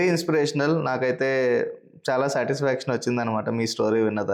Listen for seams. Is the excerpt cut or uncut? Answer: uncut